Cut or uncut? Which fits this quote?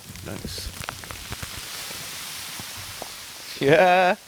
uncut